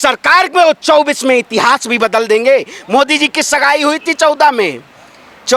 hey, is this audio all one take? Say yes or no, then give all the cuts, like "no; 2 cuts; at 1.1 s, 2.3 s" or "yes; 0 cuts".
yes; 0 cuts